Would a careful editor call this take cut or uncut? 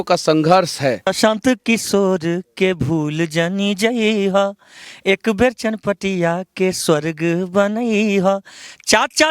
cut